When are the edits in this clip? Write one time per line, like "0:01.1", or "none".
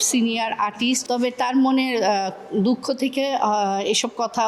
0:01.0